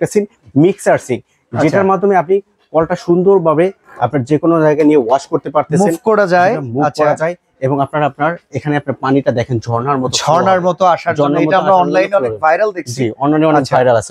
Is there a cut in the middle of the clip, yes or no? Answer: no